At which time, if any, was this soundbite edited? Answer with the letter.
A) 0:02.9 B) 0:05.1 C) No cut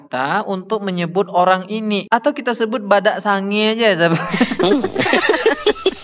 C